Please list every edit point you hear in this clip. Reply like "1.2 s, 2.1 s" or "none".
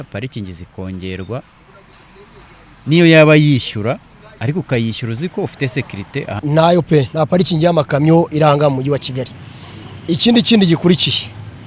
6.4 s